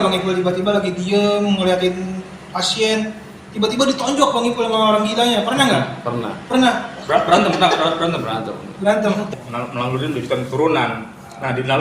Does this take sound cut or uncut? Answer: cut